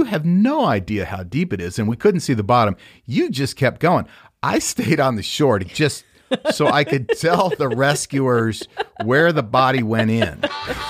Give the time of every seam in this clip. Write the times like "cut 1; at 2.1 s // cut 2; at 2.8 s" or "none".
none